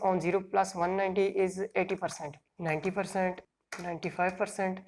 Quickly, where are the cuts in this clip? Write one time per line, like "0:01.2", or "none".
0:02.5
0:03.5